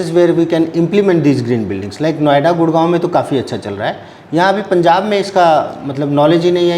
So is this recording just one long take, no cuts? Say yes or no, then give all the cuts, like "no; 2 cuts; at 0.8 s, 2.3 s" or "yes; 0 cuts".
yes; 0 cuts